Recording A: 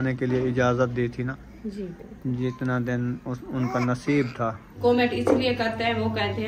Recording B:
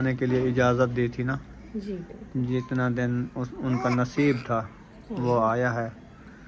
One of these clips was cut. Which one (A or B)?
A